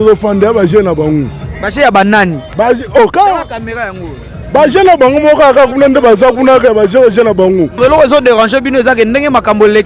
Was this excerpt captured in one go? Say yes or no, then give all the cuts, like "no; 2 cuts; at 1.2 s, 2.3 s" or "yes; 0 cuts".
no; 1 cut; at 7.8 s